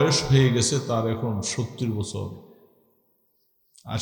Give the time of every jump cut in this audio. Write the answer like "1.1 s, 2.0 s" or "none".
none